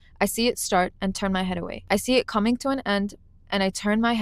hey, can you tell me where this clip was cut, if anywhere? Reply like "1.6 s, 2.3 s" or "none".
1.7 s